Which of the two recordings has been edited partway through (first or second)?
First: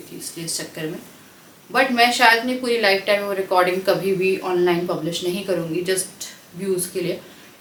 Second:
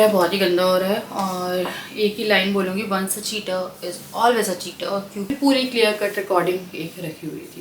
second